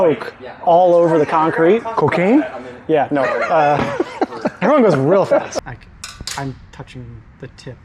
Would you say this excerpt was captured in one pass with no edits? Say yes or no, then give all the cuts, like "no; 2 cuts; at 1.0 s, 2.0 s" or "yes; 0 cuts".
no; 1 cut; at 5.5 s